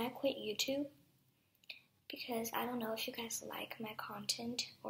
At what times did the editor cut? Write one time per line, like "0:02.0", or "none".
0:03.0